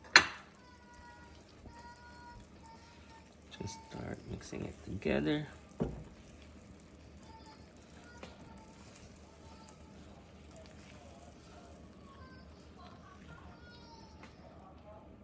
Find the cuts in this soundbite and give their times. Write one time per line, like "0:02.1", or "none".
none